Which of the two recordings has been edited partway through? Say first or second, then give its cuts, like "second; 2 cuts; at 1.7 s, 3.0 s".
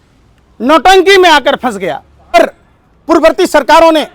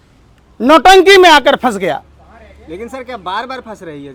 first; 1 cut; at 2.3 s